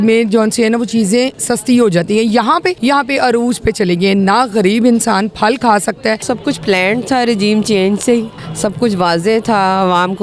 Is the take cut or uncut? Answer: cut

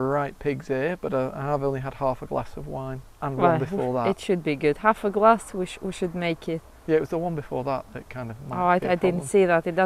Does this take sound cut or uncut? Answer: uncut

